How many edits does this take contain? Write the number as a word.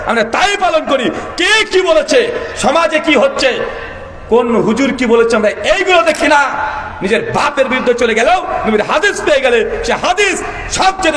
zero